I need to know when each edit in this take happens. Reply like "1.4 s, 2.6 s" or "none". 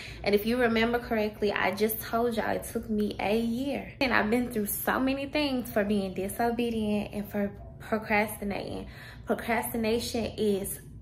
4.0 s